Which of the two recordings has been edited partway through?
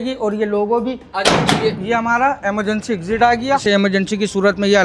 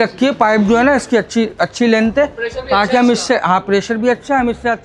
first; 2 cuts; at 1.1 s, 3.6 s

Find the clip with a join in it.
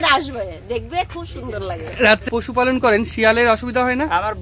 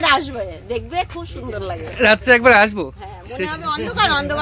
first; 1 cut; at 2.2 s

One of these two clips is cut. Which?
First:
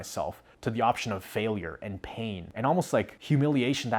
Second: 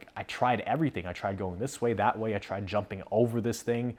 first; 1 cut; at 2.5 s

